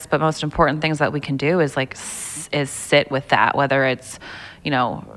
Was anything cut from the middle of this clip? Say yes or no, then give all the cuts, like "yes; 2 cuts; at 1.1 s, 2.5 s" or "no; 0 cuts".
no; 0 cuts